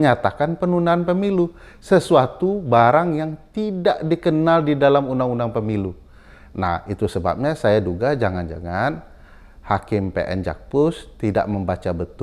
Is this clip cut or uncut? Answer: uncut